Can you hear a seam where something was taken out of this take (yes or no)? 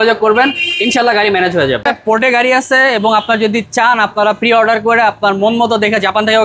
yes